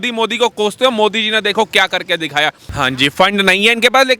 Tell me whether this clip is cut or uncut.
cut